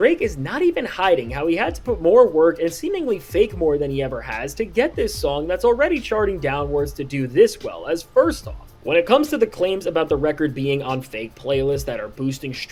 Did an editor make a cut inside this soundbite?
no; 0 cuts

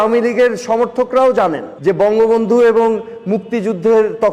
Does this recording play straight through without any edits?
no; 1 cut; at 1.7 s

